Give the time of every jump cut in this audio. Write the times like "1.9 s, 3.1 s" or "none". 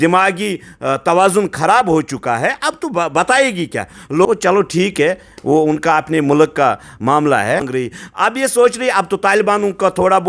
4.2 s, 7.7 s